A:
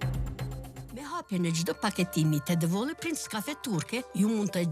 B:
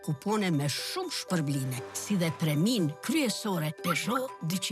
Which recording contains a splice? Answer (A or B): A